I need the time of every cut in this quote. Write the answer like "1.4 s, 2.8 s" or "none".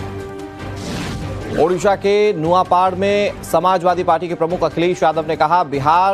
3.3 s